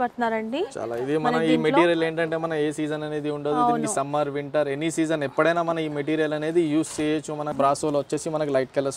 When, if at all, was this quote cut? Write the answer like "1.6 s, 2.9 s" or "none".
7.4 s